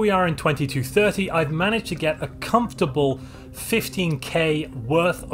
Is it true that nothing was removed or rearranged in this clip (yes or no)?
yes